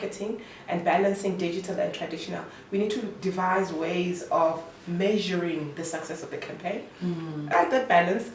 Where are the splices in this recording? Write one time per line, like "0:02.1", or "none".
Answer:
0:07.4